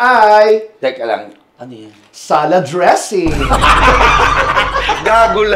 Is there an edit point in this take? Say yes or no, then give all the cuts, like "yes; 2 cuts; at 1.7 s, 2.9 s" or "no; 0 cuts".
no; 0 cuts